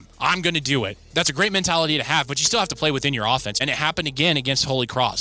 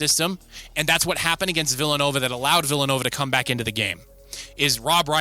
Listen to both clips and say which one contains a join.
first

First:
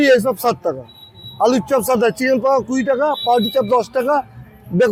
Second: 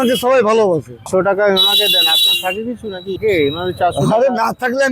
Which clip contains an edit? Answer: second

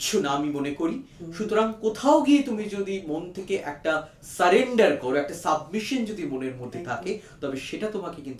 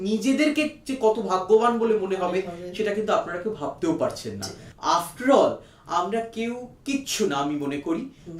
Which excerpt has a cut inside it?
second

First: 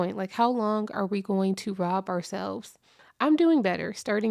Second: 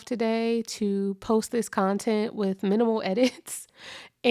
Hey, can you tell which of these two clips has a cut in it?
first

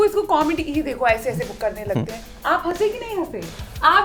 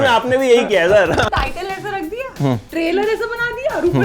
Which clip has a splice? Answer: second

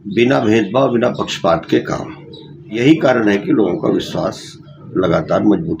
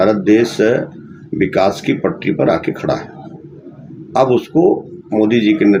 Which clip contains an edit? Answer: first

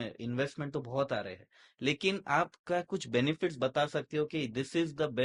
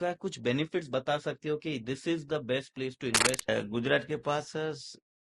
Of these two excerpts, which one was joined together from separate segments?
second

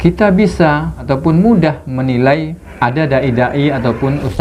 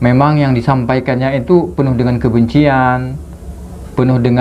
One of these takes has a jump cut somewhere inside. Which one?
first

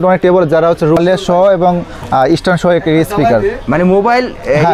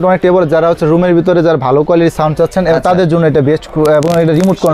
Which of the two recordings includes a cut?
first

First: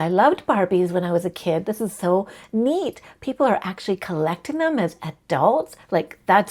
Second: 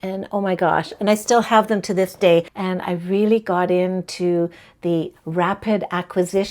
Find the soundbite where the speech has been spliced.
second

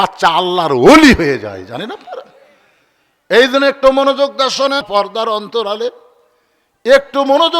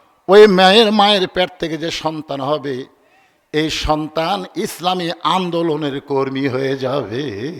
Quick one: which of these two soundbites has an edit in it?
first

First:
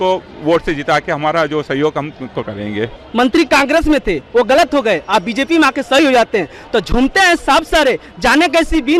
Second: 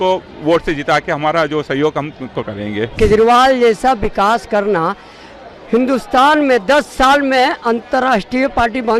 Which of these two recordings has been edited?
second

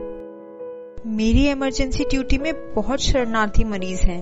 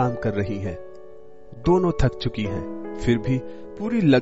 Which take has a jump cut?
first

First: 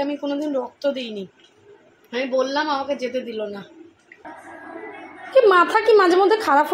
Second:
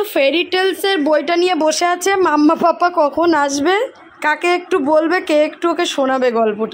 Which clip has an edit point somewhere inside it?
first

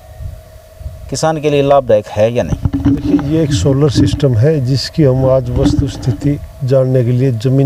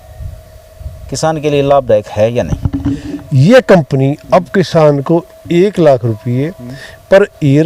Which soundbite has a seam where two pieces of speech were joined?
second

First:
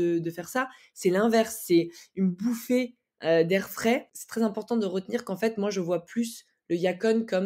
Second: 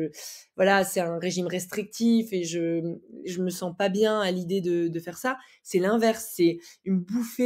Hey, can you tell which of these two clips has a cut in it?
first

